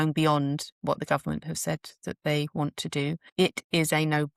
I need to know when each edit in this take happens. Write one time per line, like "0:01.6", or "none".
0:03.3